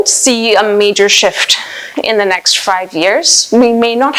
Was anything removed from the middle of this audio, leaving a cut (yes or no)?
no